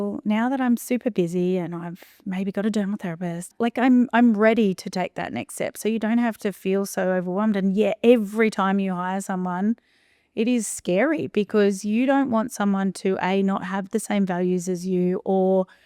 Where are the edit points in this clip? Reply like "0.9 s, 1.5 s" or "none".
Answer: 3.5 s